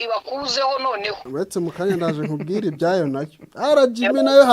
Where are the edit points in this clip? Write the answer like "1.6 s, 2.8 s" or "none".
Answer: 1.2 s